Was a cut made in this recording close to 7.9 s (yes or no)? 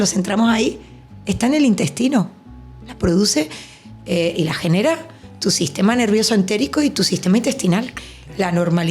yes